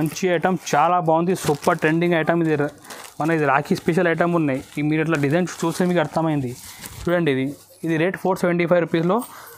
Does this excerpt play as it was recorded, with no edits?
yes; 0 cuts

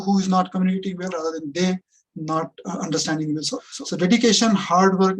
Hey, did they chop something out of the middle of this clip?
yes; 1 cut; at 3.6 s

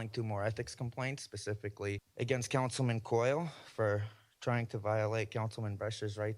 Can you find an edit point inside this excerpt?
yes; 1 cut; at 2.1 s

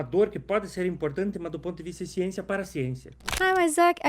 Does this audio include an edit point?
yes; 1 cut; at 3.2 s

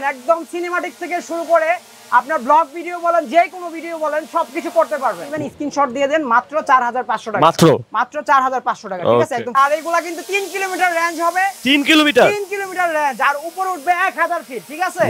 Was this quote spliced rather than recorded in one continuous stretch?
yes; 2 cuts; at 5.3 s, 9.6 s

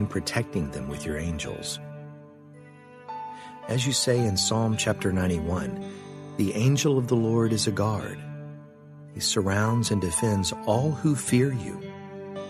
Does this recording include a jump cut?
no; 0 cuts

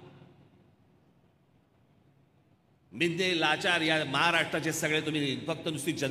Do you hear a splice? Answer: no; 0 cuts

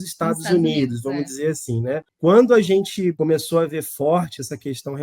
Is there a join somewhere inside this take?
yes; 2 cuts; at 2.1 s, 3.1 s

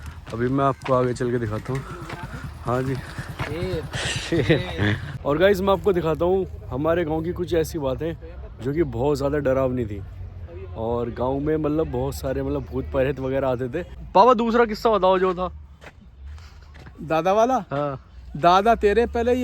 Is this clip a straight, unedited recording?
no; 2 cuts; at 5.1 s, 14.0 s

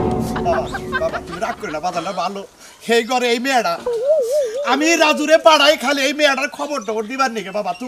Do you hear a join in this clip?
no; 0 cuts

